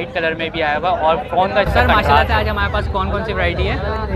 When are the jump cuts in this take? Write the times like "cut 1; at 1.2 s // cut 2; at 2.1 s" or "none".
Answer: cut 1; at 2.3 s